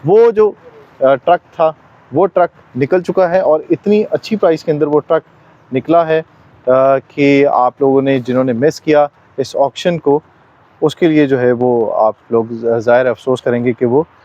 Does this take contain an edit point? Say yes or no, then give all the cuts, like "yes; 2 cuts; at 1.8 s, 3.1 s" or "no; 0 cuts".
no; 0 cuts